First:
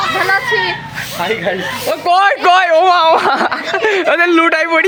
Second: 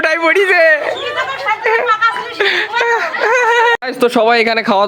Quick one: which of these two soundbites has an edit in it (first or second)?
second